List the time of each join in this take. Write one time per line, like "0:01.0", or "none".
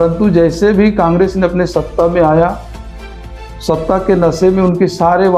none

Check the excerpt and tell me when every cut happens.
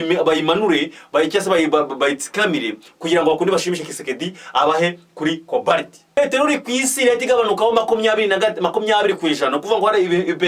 0:06.2

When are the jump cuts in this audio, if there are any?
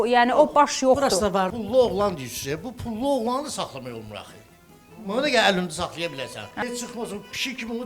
0:01.5
0:06.5

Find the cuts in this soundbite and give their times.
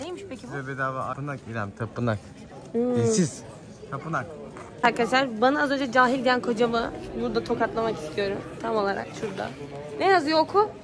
0:01.1
0:04.7

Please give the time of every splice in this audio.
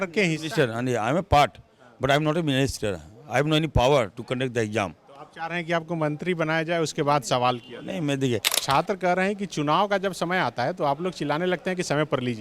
0:08.5

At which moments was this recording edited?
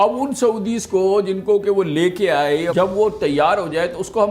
0:02.7

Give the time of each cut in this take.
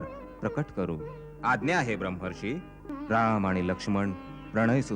0:02.8

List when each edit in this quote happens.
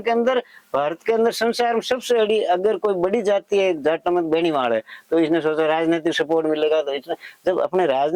none

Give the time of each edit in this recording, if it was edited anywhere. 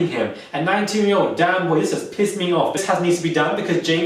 0:02.8

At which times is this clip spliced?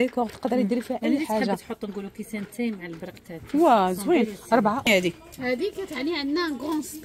0:04.9

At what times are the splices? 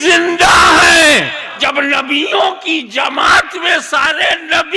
0:01.6

